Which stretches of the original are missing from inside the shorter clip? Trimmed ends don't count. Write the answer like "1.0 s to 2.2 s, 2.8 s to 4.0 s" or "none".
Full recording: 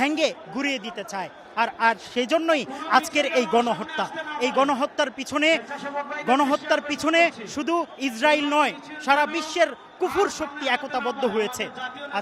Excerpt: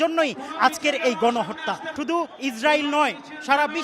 4.2 s to 7.5 s